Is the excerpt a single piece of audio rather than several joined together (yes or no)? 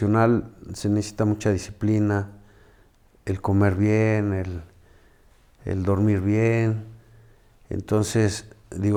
yes